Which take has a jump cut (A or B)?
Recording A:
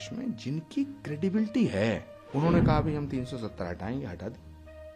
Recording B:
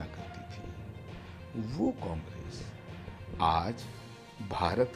A